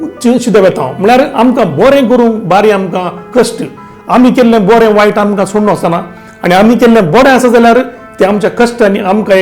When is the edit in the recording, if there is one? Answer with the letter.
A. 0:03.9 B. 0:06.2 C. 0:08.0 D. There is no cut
A